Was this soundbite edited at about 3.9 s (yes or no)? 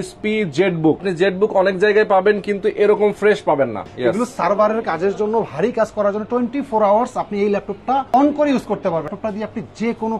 yes